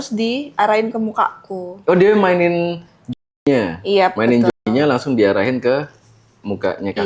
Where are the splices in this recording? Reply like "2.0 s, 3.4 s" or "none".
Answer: none